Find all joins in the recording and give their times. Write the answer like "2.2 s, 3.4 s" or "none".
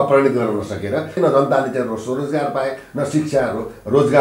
1.2 s

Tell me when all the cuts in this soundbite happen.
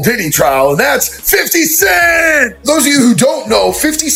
none

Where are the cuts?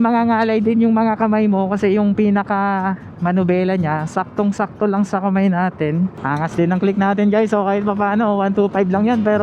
6.2 s

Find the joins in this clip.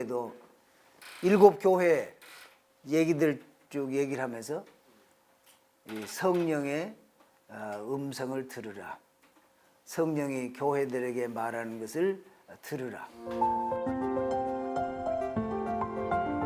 13.1 s

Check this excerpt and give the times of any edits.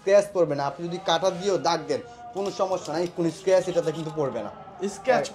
none

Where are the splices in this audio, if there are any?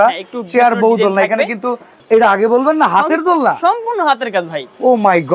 1.9 s

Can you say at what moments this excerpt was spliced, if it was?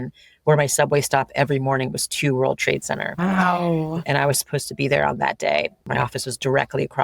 5.8 s

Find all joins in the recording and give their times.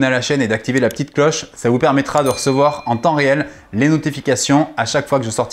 none

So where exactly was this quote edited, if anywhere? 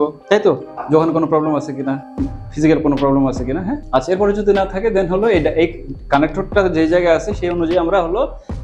none

